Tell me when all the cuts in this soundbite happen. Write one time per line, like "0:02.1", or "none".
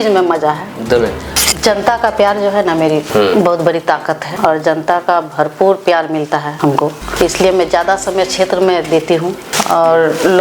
0:01.2
0:03.1
0:04.3
0:06.8
0:09.5